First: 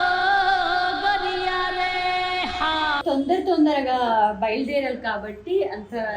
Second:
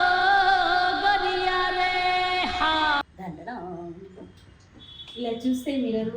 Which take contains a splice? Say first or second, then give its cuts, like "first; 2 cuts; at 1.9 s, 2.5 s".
first; 1 cut; at 3.0 s